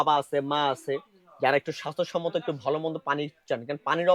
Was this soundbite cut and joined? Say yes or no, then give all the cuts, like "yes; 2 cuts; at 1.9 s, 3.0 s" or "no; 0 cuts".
no; 0 cuts